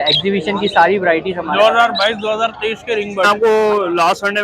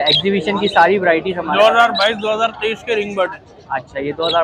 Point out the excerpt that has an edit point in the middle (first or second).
first